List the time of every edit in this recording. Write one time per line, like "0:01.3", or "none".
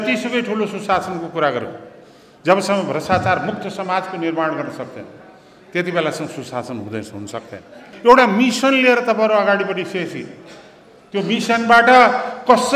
0:07.9